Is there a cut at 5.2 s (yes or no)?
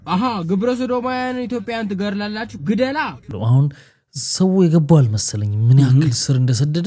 no